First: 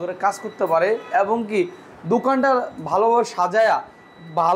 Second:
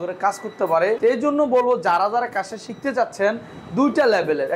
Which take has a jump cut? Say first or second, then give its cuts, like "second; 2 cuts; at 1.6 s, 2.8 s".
second; 1 cut; at 1.0 s